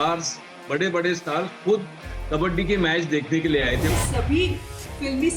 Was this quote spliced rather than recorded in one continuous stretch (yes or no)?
yes